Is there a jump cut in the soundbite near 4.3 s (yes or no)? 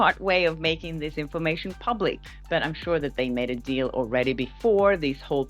no